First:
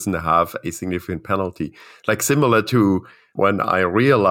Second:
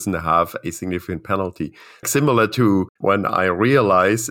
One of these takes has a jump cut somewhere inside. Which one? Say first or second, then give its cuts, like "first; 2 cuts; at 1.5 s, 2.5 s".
second; 2 cuts; at 2.0 s, 2.9 s